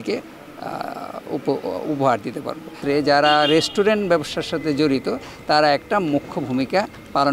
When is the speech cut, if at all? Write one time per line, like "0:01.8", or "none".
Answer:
0:02.8

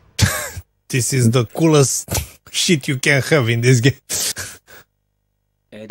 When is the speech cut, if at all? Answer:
none

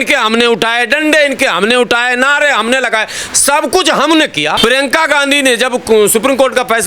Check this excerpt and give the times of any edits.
0:04.6

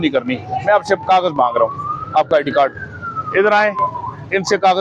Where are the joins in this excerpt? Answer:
none

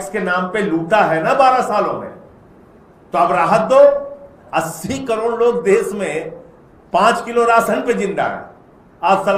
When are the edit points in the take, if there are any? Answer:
0:04.4

